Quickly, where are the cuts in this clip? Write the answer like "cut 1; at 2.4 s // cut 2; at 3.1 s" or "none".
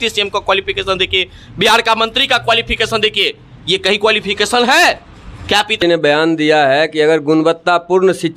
cut 1; at 5.8 s